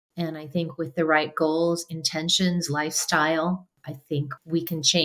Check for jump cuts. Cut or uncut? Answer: cut